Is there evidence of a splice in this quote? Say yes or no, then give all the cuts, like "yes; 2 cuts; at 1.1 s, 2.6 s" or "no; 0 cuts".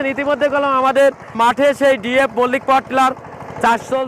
yes; 1 cut; at 1.3 s